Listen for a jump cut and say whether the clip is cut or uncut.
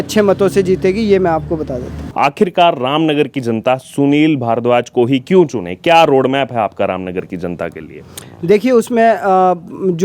cut